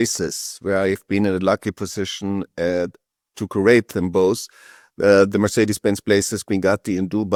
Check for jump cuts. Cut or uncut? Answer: uncut